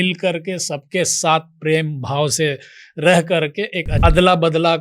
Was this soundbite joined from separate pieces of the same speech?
yes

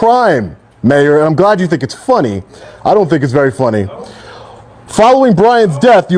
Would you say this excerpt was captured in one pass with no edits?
yes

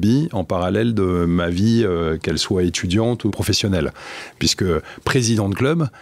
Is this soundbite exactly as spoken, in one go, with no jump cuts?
no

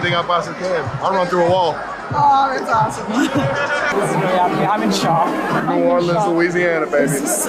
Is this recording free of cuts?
yes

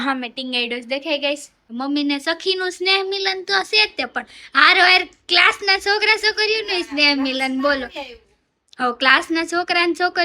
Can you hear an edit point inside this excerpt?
yes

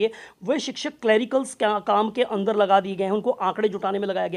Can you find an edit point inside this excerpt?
no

